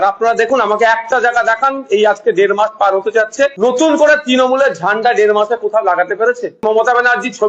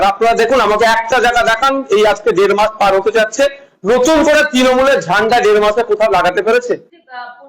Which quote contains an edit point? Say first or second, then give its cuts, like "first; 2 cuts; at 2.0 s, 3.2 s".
first; 2 cuts; at 3.5 s, 6.6 s